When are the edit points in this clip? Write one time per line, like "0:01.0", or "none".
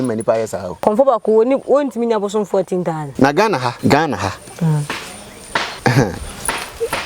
0:00.8
0:03.1
0:03.8
0:05.7

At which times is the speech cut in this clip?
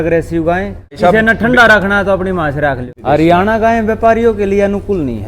0:01.0
0:02.8

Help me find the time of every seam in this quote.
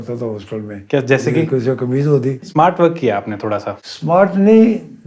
0:02.4

